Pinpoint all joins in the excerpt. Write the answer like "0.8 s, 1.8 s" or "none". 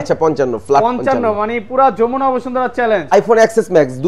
3.1 s